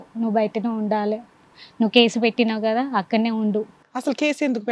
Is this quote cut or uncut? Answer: uncut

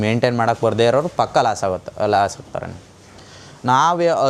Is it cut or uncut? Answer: uncut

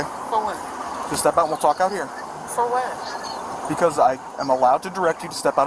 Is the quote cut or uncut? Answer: uncut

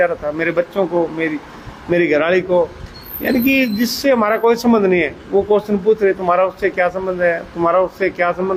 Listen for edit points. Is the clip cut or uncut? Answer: uncut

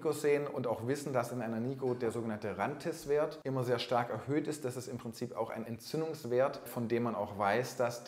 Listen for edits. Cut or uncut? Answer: cut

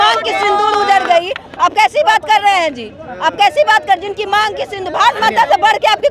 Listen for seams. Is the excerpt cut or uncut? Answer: uncut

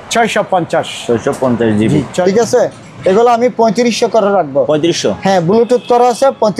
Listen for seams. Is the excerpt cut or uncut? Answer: cut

